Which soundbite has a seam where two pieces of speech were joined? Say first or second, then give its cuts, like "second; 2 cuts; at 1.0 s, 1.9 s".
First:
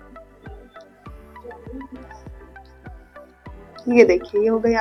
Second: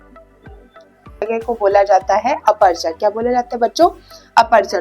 second; 1 cut; at 1.2 s